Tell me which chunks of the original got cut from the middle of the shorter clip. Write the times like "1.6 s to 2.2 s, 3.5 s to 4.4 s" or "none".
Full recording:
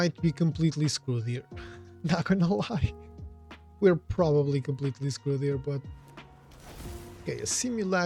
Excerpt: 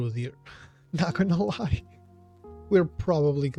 none